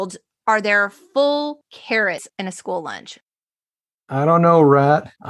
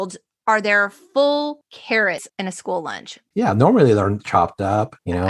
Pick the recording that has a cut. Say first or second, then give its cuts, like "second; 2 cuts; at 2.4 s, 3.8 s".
first; 1 cut; at 3.5 s